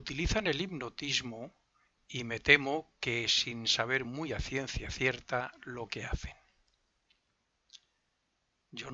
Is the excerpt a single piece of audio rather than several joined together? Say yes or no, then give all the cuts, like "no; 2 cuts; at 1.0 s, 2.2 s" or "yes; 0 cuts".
no; 1 cut; at 4.4 s